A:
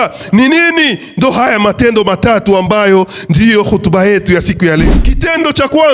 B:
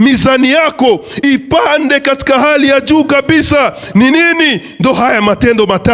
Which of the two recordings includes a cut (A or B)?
A